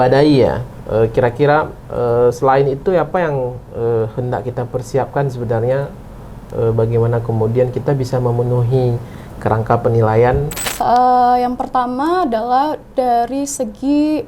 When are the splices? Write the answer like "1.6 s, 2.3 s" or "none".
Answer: 10.6 s